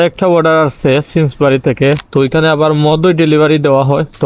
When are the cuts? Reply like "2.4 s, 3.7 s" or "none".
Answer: 2.0 s